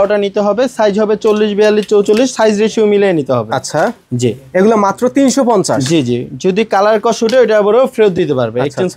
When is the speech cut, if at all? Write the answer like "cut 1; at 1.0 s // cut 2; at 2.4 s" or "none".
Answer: none